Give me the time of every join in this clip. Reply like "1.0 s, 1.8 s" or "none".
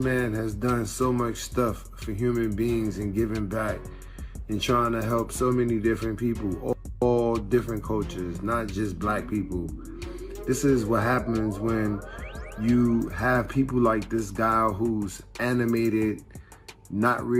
none